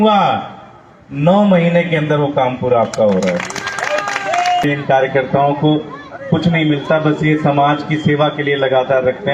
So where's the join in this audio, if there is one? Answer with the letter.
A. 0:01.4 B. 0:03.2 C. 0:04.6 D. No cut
C